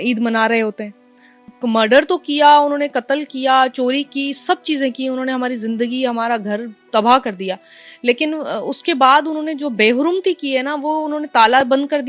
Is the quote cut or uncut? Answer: cut